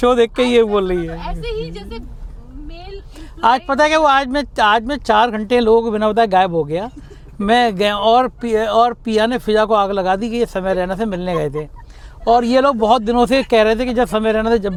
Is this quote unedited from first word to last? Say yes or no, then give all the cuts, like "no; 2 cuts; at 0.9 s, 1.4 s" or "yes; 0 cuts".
yes; 0 cuts